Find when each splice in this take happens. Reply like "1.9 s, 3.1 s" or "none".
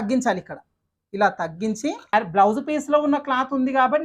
2.0 s